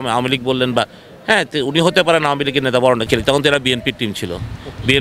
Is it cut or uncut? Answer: cut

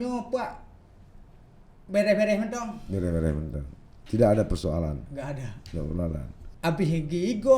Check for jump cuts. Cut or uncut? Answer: cut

